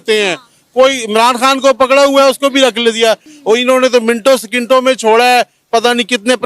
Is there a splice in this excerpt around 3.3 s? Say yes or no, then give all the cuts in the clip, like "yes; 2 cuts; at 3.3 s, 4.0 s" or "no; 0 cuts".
yes; 1 cut; at 3.3 s